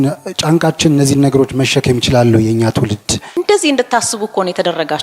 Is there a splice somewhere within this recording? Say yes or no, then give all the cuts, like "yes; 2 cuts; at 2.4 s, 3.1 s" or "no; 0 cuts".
yes; 1 cut; at 3.4 s